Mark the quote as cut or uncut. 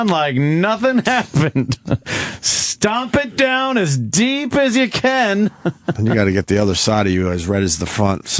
cut